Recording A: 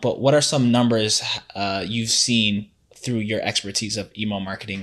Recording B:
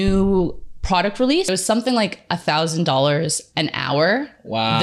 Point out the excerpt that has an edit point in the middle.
B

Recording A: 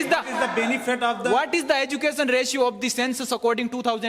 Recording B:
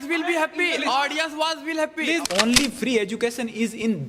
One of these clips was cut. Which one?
B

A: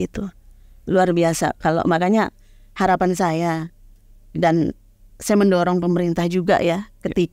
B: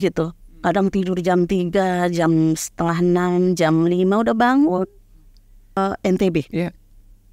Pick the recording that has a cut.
B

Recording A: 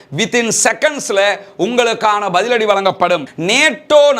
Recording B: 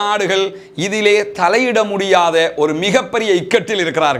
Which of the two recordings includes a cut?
A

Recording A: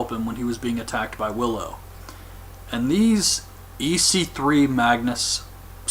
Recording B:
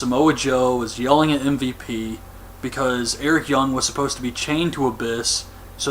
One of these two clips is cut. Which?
B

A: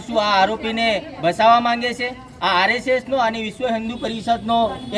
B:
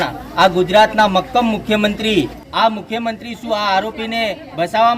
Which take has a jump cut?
B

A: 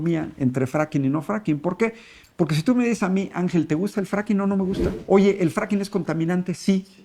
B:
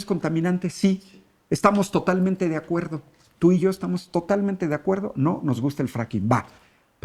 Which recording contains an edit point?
A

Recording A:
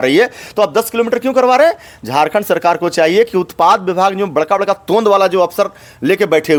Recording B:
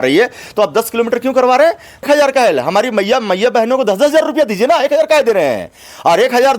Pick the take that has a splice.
B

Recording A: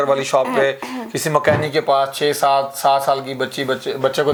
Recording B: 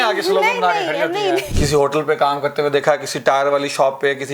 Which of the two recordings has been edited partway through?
B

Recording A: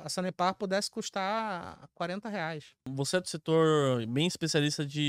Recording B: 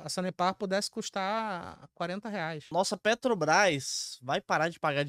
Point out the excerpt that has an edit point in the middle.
B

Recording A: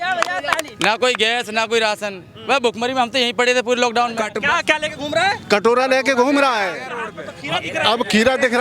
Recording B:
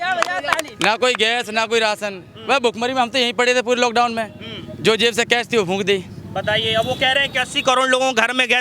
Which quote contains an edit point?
A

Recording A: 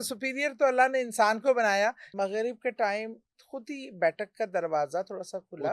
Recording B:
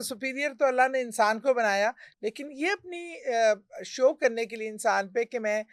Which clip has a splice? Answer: A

